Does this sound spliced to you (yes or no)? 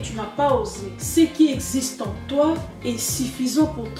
no